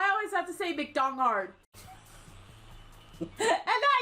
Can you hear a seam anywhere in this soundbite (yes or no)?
no